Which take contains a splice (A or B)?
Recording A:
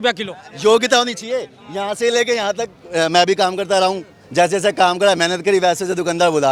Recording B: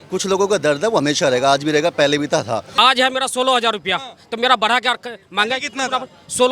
B